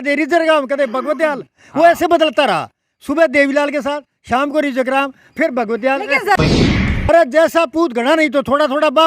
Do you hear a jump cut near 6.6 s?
yes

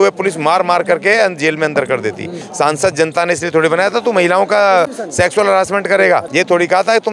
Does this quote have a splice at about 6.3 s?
yes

